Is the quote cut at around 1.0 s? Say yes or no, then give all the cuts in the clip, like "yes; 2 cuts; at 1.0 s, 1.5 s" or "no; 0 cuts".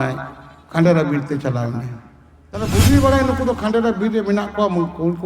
no; 1 cut; at 2.7 s